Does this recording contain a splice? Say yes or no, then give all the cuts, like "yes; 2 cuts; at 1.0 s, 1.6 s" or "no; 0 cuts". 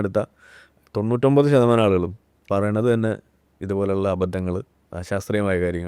no; 0 cuts